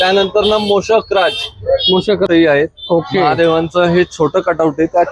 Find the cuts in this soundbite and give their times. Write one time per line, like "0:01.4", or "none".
0:02.3